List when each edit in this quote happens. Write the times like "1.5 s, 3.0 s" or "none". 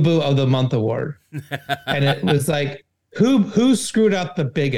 none